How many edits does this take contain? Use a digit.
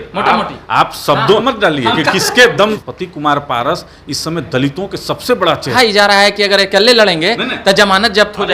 3